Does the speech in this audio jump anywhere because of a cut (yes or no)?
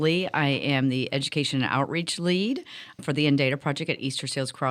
yes